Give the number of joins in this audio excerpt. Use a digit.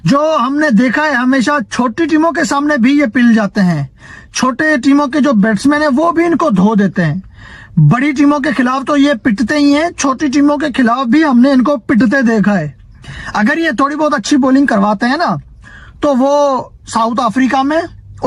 0